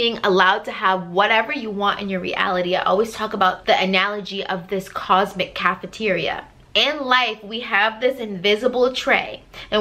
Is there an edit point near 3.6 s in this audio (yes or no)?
yes